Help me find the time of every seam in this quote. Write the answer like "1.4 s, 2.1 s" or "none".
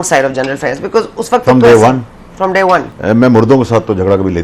2.9 s

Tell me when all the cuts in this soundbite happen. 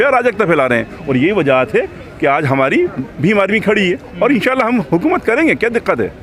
none

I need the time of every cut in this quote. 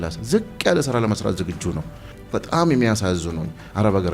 2.1 s

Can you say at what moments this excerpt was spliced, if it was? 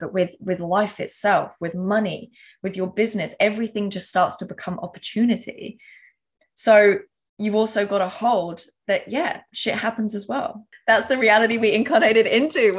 10.7 s

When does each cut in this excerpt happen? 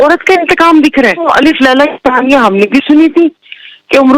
1.2 s

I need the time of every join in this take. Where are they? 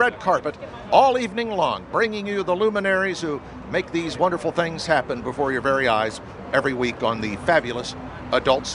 6.7 s

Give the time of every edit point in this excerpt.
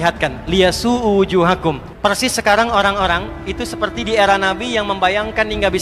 1.9 s

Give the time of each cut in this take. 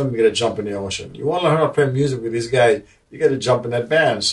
none

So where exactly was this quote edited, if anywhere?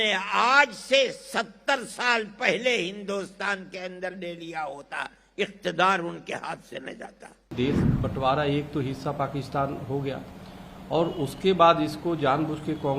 7.5 s

